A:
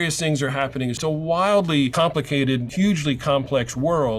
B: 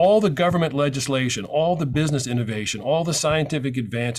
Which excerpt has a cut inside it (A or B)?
A